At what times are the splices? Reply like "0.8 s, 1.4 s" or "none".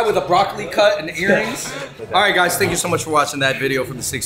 none